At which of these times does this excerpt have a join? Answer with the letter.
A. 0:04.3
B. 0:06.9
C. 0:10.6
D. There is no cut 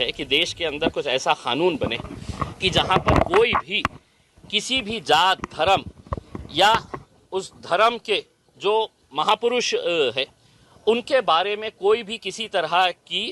D